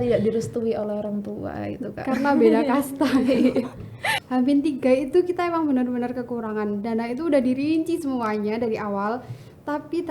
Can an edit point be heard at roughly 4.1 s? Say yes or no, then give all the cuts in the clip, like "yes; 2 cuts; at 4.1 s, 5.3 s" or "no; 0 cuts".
yes; 1 cut; at 4.1 s